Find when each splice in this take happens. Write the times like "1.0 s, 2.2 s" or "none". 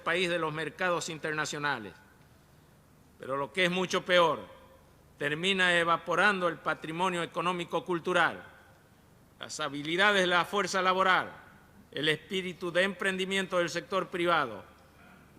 8.5 s